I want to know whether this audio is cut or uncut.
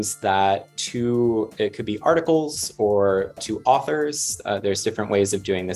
cut